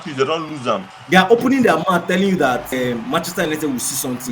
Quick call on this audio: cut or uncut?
cut